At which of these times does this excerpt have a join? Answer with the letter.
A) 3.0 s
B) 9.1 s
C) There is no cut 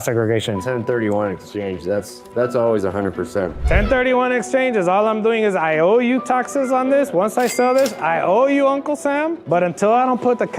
C